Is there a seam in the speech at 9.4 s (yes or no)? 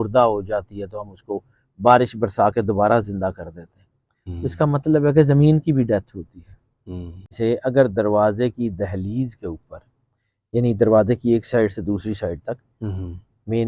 no